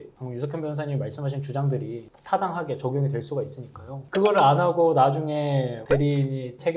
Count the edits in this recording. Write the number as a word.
one